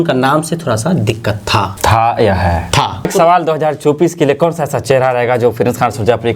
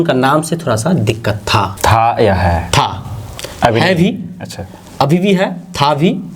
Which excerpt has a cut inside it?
first; 1 cut; at 3.1 s

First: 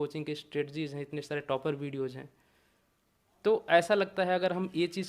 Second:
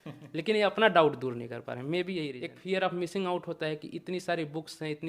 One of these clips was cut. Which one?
second; 1 cut; at 2.5 s

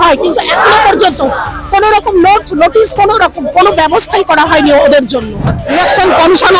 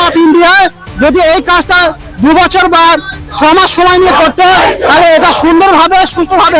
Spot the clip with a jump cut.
first; 1 cut; at 5.5 s

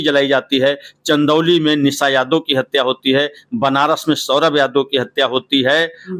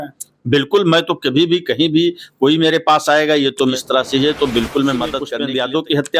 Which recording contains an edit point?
second; 2 cuts; at 3.8 s, 5.3 s

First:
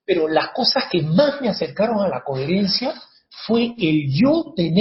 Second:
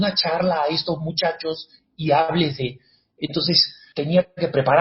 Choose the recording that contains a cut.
second; 1 cut; at 3.8 s

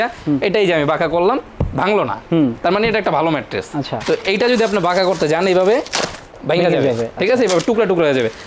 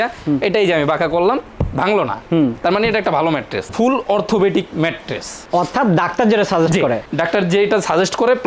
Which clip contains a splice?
second; 1 cut; at 3.7 s

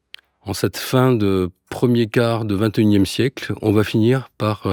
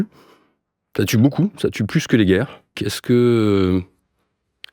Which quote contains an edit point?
second; 1 cut; at 2.9 s

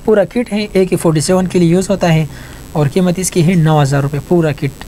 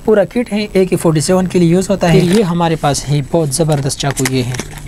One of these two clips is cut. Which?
second; 1 cut; at 2.1 s

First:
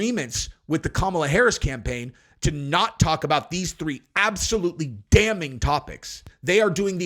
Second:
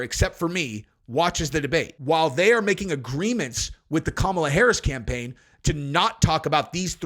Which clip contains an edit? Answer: second; 1 cut; at 1.9 s

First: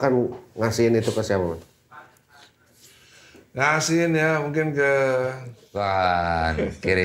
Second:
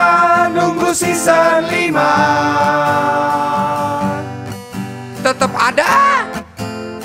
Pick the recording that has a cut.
first; 1 cut; at 5.6 s

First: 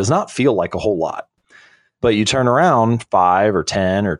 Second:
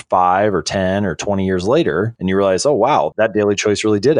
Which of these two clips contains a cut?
first; 1 cut; at 1.3 s

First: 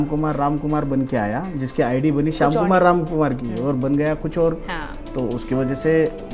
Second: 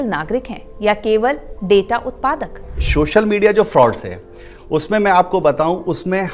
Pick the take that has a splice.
second; 1 cut; at 2.8 s

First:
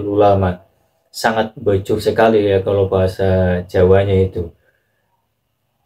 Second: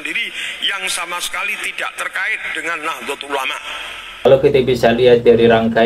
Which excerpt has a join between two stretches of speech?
second; 1 cut; at 4.3 s

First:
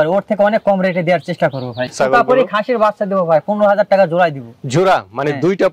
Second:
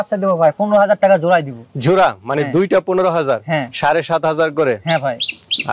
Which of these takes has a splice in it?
first; 1 cut; at 1.8 s

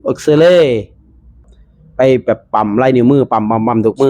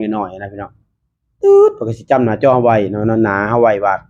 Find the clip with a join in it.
first; 1 cut; at 1.5 s

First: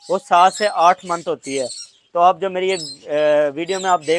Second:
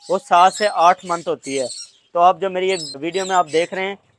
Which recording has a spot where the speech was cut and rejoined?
second; 1 cut; at 3.0 s

